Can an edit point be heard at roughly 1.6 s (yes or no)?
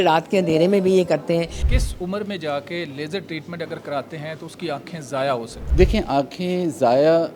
yes